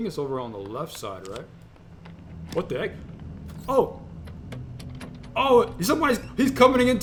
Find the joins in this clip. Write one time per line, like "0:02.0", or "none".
none